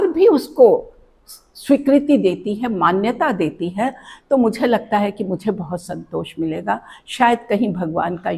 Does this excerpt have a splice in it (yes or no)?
no